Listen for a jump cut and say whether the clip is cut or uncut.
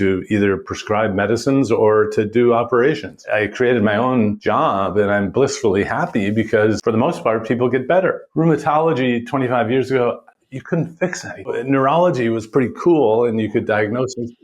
cut